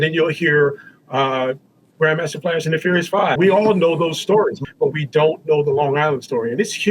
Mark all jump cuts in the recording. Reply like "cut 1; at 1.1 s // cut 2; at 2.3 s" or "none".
cut 1; at 3.4 s // cut 2; at 4.6 s